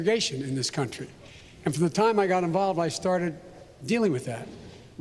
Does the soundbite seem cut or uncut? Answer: uncut